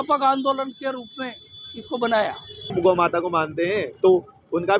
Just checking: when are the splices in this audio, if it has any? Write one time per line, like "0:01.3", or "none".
0:02.7